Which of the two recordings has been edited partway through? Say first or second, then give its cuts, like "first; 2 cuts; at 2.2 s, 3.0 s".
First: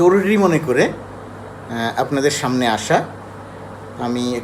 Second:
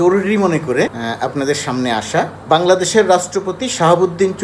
second; 2 cuts; at 1.0 s, 2.4 s